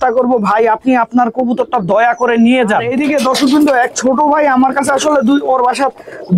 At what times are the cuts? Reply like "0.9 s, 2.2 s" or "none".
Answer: 2.9 s